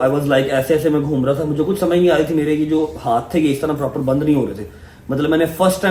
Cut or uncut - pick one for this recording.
uncut